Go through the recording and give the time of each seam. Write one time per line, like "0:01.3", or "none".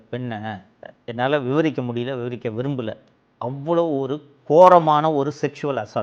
0:00.9